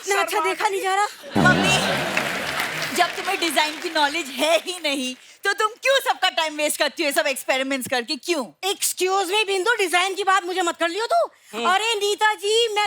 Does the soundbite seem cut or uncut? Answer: uncut